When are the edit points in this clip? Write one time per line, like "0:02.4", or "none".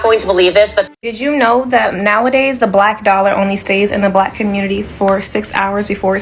0:01.0